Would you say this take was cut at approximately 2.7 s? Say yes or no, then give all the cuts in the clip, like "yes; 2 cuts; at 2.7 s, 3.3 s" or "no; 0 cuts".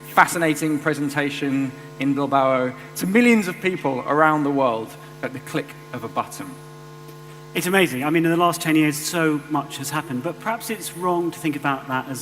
no; 1 cut; at 5.0 s